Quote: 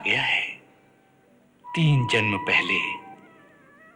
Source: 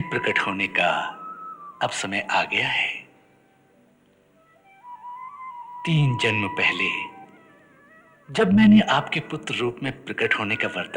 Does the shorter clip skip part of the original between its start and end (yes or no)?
yes